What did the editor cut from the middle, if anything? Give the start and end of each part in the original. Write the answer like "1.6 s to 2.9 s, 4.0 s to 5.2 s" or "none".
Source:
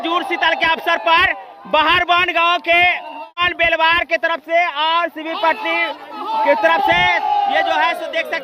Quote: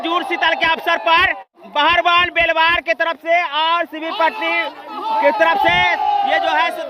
1.7 s to 2.9 s